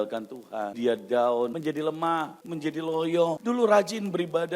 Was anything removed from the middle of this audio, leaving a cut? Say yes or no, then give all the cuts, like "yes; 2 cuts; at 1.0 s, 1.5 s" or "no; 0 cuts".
yes; 4 cuts; at 0.7 s, 1.5 s, 2.4 s, 3.4 s